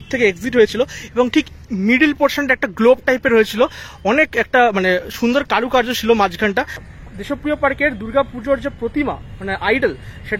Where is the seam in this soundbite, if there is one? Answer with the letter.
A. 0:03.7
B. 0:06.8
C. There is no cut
B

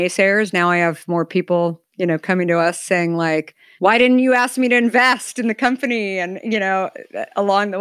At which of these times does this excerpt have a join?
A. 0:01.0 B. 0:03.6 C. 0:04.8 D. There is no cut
B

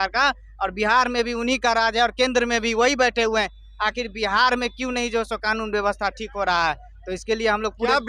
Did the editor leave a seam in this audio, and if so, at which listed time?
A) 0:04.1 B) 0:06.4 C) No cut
C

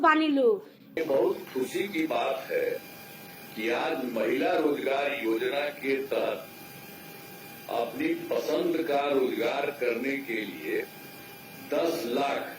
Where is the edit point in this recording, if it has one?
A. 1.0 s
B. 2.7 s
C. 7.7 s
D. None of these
A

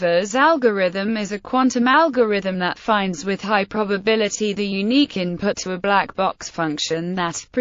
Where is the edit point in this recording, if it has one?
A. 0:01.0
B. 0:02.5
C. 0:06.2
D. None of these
A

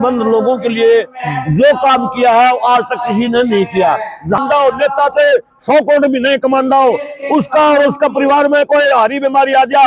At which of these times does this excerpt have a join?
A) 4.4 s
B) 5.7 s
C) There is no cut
A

